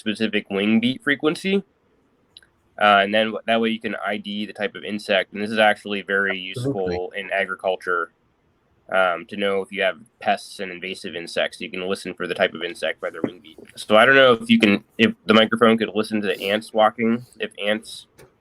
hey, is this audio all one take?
no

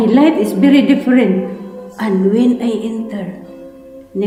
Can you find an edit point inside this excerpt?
no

